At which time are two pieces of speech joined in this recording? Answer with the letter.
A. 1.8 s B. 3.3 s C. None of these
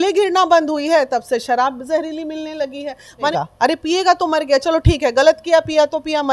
B